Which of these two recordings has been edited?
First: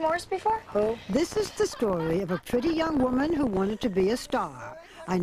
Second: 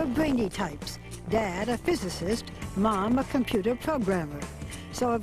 first; 1 cut; at 1.9 s

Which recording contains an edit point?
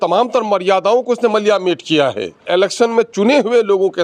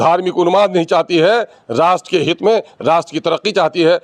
first; 1 cut; at 2.4 s

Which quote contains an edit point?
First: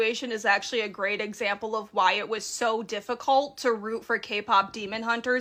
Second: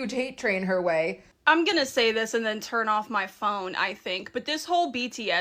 second; 1 cut; at 1.3 s

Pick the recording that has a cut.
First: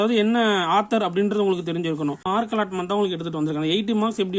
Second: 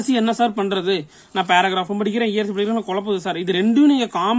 first; 1 cut; at 2.5 s

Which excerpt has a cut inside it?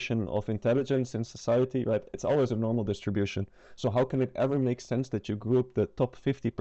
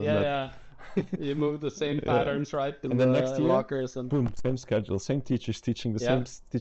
second; 1 cut; at 2.8 s

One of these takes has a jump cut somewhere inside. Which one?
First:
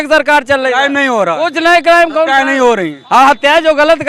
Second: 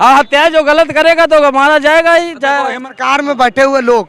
second; 1 cut; at 2.8 s

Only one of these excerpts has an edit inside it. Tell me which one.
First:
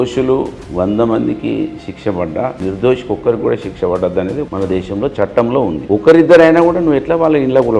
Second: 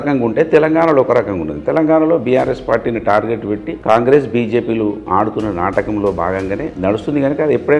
first; 3 cuts; at 2.6 s, 4.5 s, 5.8 s

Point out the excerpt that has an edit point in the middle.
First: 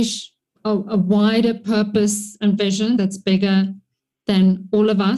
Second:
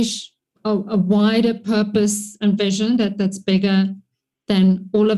first; 1 cut; at 3.0 s

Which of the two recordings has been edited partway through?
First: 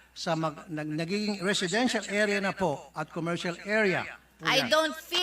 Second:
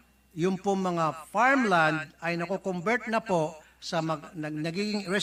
first; 1 cut; at 4.3 s

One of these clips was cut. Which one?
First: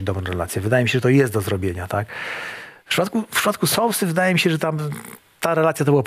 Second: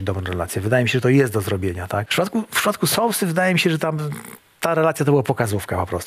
second; 1 cut; at 2.1 s

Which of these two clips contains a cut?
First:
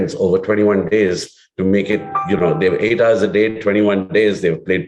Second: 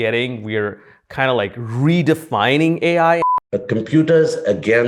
second; 1 cut; at 3.3 s

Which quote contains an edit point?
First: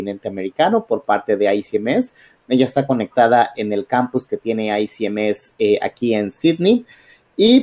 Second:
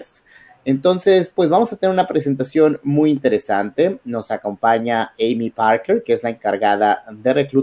second; 1 cut; at 3.0 s

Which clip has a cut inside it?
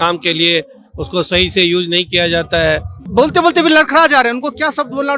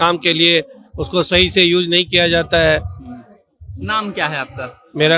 first; 1 cut; at 3.0 s

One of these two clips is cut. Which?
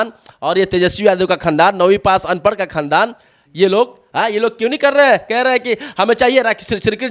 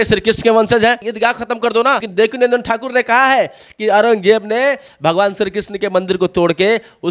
second; 2 cuts; at 1.1 s, 2.1 s

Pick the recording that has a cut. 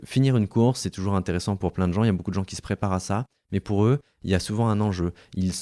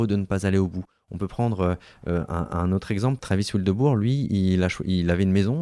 second; 1 cut; at 3.2 s

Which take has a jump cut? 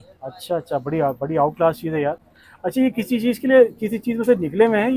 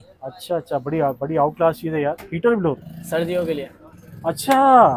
second; 1 cut; at 2.3 s

